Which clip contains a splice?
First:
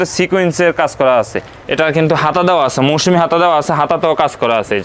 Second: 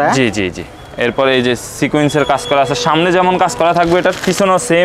first; 1 cut; at 1.4 s

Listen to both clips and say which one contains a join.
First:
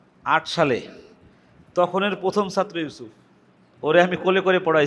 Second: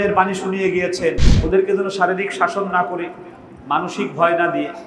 second; 1 cut; at 1.3 s

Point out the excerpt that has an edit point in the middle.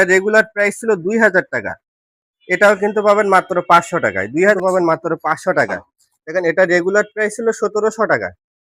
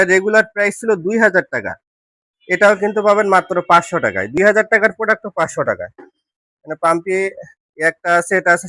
first; 1 cut; at 4.4 s

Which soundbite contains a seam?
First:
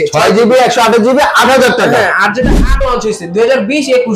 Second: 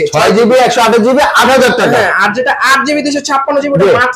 first; 1 cut; at 2.9 s

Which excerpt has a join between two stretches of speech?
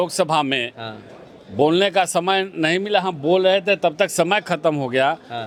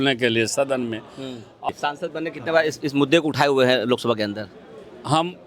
second; 1 cut; at 1.7 s

